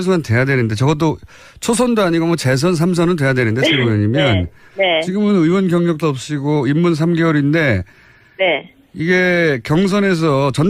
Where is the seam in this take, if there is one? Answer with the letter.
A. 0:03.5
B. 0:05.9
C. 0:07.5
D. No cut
B